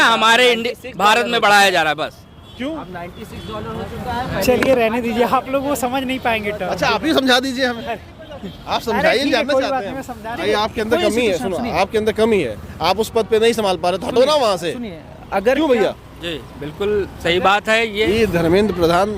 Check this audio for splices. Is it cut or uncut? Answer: cut